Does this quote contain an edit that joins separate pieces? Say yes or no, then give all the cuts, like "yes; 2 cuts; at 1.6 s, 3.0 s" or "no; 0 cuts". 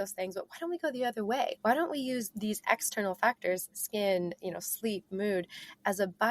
yes; 1 cut; at 1.6 s